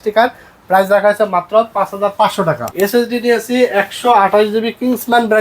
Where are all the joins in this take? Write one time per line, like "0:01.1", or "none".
0:02.6